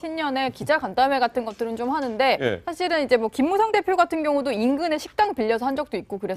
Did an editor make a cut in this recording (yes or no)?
no